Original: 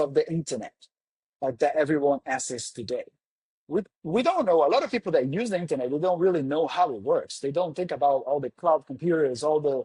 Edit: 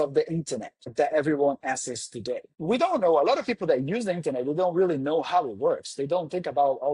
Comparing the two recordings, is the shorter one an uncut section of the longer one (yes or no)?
no